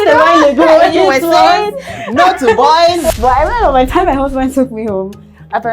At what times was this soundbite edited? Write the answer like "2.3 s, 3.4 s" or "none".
3.1 s